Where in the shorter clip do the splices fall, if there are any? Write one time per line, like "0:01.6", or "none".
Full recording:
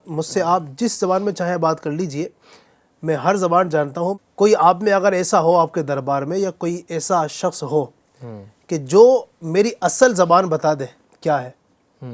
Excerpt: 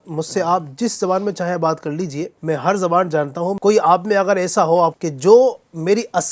0:02.3
0:03.6
0:05.0